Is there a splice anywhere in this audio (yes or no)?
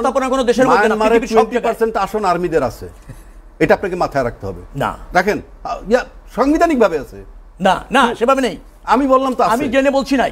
no